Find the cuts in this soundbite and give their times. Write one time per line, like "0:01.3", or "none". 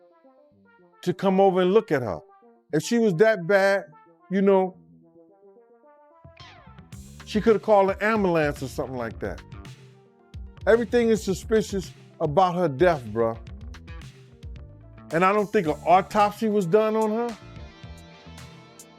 0:01.0